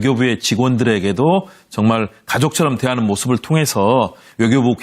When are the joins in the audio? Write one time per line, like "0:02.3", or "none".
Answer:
0:02.7